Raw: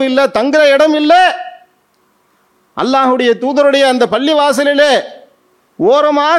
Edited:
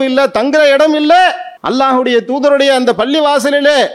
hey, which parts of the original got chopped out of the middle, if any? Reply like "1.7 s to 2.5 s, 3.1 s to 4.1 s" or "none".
1.5 s to 2.6 s